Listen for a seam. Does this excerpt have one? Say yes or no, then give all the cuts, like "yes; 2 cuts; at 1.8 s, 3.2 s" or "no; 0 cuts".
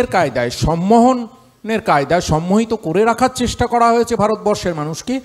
no; 0 cuts